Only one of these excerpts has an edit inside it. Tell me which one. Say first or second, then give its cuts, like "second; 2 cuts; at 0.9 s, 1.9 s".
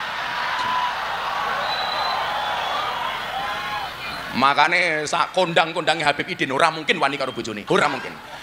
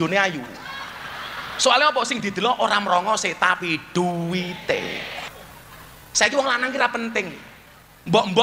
second; 1 cut; at 5.4 s